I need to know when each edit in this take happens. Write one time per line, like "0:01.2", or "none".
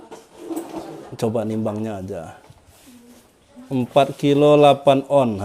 none